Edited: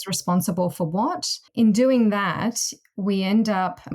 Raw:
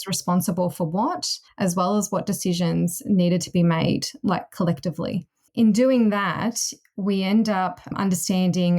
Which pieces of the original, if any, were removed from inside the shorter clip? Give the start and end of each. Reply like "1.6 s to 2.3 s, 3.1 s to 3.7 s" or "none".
1.4 s to 5.4 s